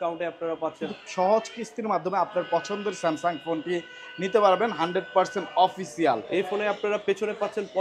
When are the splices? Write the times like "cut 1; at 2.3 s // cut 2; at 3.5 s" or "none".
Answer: cut 1; at 0.9 s // cut 2; at 6.2 s